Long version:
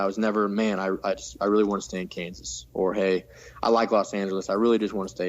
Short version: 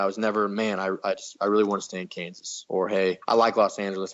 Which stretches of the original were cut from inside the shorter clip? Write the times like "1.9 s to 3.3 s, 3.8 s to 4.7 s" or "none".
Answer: 2.8 s to 3.2 s